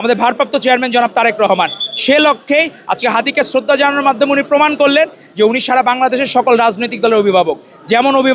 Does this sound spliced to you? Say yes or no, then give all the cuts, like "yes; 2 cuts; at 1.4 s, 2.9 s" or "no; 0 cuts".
no; 0 cuts